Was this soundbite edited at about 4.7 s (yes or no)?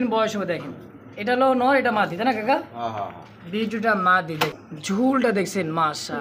yes